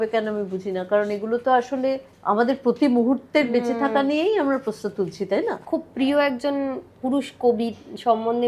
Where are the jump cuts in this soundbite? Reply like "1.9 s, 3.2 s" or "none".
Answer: 2.1 s, 5.6 s